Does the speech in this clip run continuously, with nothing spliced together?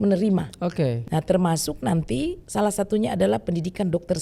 no; 2 cuts; at 1.0 s, 2.4 s

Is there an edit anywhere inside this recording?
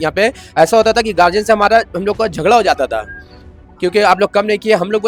no; 0 cuts

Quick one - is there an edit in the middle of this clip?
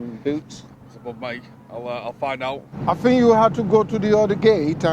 yes; 1 cut; at 2.7 s

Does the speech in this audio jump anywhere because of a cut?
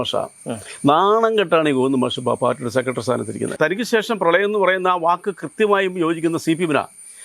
yes; 1 cut; at 3.5 s

